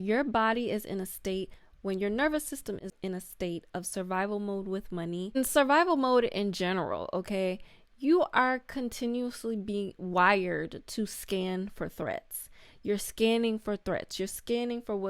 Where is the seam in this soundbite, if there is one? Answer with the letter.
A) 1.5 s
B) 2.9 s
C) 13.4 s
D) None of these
B